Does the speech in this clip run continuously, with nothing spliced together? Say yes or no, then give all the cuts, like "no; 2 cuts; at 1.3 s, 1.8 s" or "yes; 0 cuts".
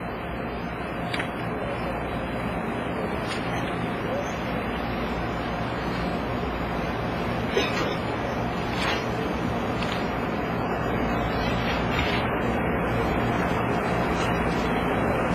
no; 1 cut; at 3.1 s